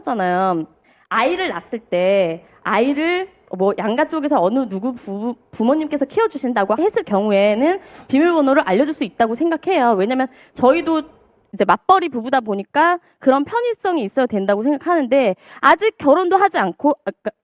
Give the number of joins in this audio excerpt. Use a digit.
1